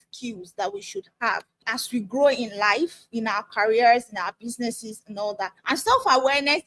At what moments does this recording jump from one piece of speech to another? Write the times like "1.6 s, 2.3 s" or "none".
5.5 s